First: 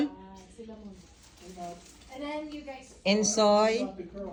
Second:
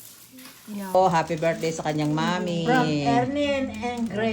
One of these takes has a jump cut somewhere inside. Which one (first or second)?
second